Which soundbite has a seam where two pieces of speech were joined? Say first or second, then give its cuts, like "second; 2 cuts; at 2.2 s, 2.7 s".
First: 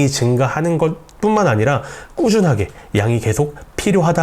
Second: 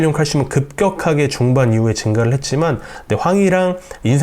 second; 1 cut; at 2.9 s